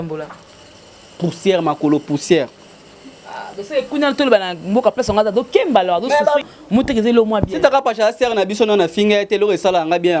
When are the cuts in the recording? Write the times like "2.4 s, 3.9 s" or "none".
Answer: 6.4 s

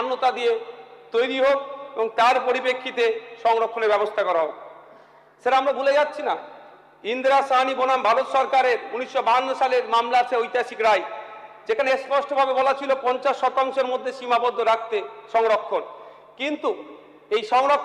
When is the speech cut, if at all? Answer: none

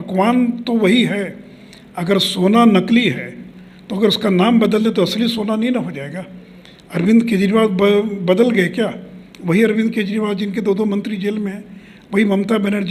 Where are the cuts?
none

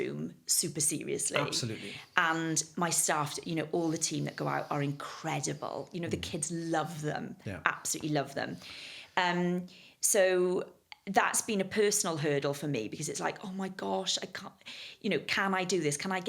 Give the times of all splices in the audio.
none

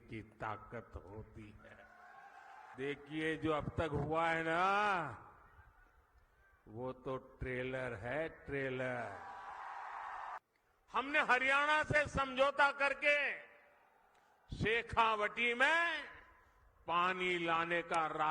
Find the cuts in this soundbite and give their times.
2.7 s, 10.4 s

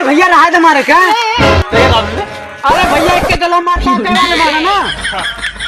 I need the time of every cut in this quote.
none

